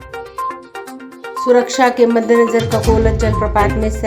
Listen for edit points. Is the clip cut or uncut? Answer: uncut